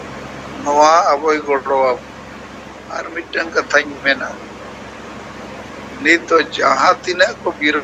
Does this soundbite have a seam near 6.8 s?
no; 1 cut; at 3.1 s

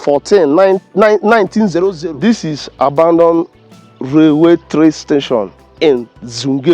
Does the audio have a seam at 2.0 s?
yes; 1 cut; at 2.0 s

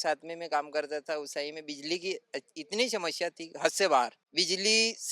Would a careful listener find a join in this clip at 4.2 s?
yes; 1 cut; at 4.2 s

